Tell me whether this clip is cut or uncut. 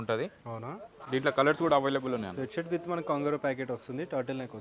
uncut